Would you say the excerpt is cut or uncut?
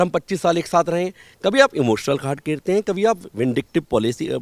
uncut